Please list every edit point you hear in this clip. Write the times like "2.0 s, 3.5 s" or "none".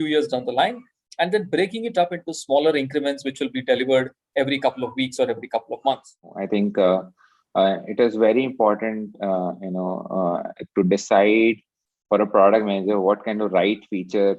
6.4 s